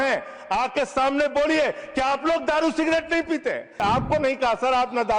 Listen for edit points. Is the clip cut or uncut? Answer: cut